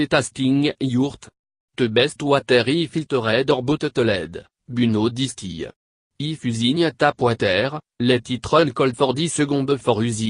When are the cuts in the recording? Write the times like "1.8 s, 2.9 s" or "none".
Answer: 0.9 s